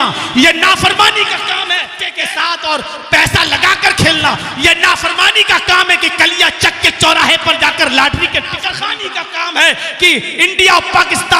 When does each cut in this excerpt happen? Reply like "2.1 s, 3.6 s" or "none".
2.0 s, 8.7 s